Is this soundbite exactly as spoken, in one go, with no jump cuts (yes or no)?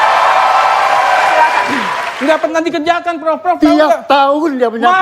no